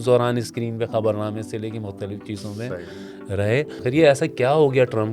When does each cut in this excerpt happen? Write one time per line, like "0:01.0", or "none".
0:03.8